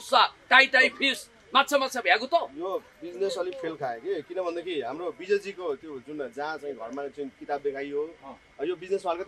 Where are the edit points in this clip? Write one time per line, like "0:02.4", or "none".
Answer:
none